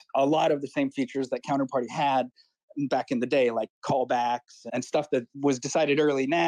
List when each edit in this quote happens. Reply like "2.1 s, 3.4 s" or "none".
5.0 s